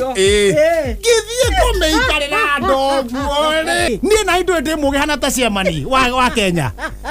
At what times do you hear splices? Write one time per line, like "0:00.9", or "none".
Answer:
0:03.9